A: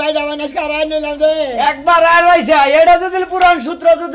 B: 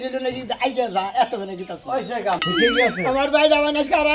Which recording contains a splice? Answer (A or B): B